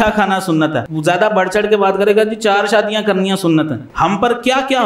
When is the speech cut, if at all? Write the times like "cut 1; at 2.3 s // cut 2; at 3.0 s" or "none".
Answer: cut 1; at 0.9 s // cut 2; at 3.8 s